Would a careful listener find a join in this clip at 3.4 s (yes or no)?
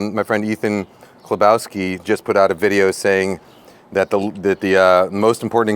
no